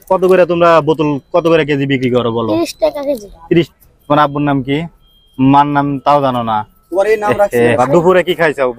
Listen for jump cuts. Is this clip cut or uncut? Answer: cut